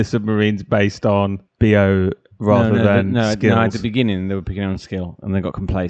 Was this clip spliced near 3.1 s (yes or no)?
no